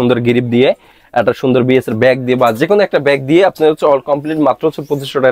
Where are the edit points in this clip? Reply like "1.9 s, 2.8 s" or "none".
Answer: none